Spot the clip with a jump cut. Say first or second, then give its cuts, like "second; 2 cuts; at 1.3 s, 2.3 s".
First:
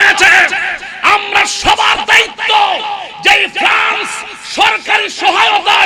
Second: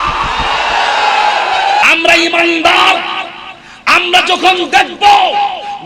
second; 1 cut; at 1.8 s